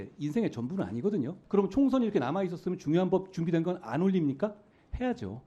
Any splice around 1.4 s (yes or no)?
yes